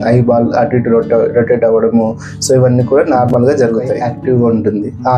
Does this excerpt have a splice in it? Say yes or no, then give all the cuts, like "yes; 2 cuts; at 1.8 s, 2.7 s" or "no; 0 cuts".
yes; 1 cut; at 4.1 s